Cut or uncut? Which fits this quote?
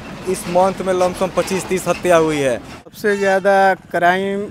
cut